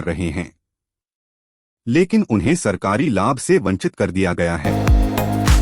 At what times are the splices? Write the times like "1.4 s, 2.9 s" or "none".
4.6 s